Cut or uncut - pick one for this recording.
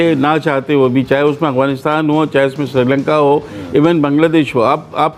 uncut